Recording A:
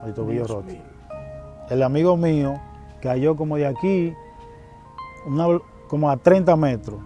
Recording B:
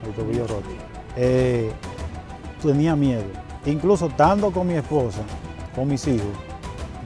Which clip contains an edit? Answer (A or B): B